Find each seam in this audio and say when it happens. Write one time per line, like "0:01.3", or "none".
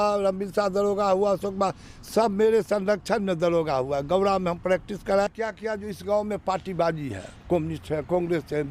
0:05.3